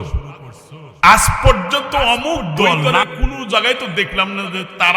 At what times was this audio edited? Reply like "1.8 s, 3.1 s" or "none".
2.9 s